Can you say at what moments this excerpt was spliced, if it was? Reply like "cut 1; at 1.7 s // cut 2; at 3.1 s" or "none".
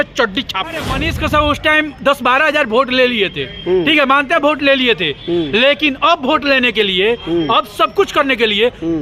cut 1; at 1.0 s